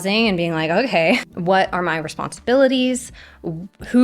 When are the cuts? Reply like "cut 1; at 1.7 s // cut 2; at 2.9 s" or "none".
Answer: cut 1; at 1.2 s